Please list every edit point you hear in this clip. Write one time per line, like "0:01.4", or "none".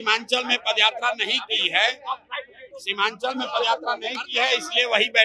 none